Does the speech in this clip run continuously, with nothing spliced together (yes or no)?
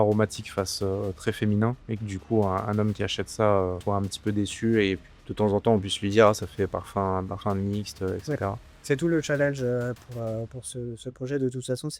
no